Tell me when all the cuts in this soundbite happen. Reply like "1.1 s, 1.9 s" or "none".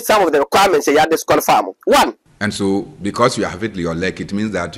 2.3 s